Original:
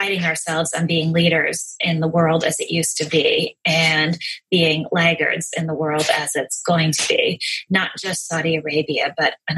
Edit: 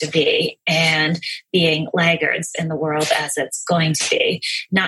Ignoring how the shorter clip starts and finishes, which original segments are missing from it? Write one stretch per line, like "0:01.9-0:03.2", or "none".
none